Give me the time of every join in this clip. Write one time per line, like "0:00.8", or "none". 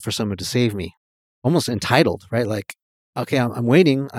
0:01.5